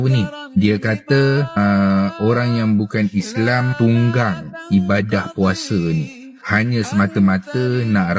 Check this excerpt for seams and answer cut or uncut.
uncut